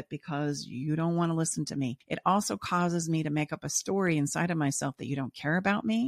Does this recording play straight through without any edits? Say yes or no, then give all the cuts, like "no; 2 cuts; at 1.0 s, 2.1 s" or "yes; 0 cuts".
no; 1 cut; at 2.1 s